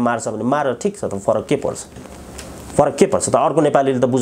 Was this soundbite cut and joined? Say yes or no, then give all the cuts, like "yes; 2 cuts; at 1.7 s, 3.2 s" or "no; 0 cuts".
no; 0 cuts